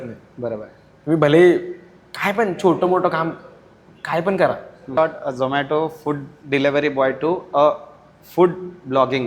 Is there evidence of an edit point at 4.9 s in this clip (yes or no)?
yes